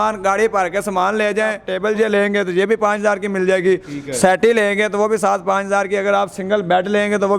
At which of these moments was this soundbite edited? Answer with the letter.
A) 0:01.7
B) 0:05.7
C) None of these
A